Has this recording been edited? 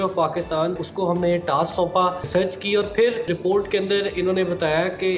yes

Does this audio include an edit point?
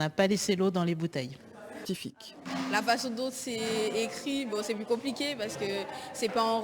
yes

